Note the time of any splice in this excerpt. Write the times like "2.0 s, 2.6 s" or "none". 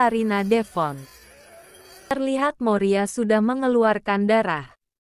2.1 s